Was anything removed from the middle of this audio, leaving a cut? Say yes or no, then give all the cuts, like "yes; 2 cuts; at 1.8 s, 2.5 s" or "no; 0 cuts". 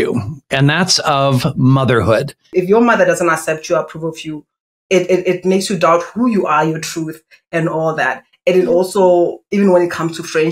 yes; 1 cut; at 2.5 s